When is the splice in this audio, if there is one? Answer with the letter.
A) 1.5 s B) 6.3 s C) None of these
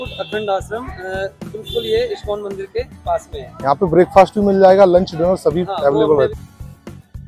B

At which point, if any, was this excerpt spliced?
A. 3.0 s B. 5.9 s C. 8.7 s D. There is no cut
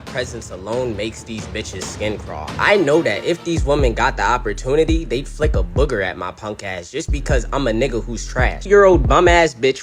C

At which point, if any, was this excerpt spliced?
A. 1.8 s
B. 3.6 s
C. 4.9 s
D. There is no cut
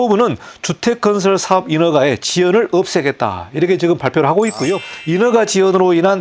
C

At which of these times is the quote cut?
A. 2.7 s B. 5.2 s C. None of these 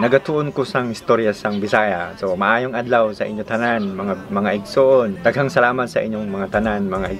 B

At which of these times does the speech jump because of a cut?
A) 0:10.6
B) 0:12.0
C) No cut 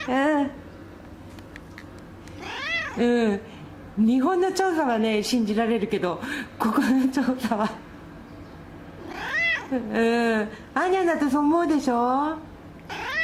B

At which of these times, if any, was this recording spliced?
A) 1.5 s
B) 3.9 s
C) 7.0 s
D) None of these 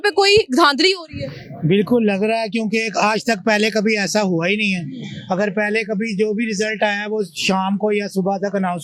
D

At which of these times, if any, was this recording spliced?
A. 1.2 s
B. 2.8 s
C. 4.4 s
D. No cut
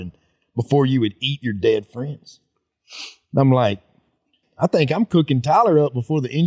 C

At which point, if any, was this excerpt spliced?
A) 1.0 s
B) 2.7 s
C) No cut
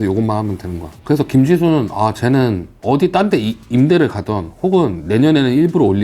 B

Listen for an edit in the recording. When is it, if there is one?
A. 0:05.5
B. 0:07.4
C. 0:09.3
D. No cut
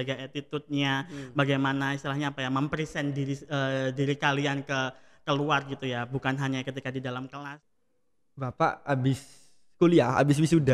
B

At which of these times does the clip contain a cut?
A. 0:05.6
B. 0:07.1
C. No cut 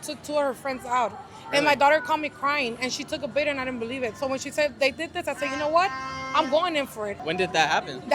B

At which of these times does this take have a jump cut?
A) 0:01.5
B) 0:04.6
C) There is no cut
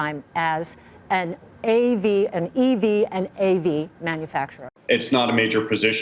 B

